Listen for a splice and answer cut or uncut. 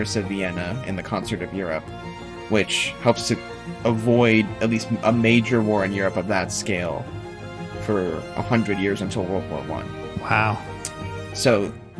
uncut